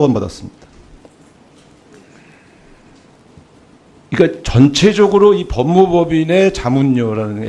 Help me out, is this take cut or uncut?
cut